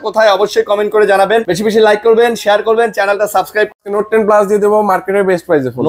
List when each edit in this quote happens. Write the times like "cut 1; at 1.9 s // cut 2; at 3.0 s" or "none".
cut 1; at 1.5 s // cut 2; at 3.7 s